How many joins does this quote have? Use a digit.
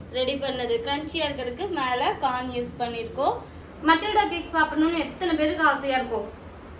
1